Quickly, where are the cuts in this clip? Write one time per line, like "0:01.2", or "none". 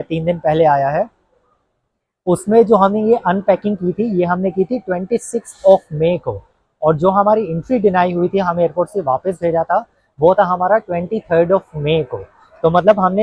none